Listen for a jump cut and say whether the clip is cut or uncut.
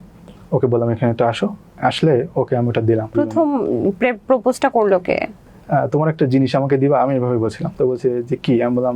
cut